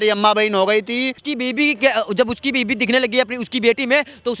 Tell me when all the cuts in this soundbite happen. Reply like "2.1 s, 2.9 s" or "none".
1.2 s